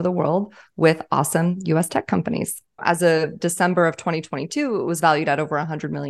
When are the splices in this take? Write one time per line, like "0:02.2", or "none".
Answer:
0:02.8